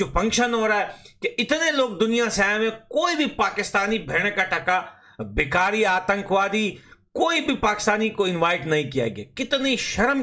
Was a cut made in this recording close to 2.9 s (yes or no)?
no